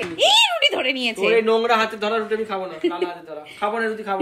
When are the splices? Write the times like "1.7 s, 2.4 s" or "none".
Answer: none